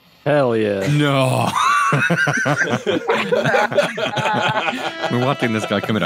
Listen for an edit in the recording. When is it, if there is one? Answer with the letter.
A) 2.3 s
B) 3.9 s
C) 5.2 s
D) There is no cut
D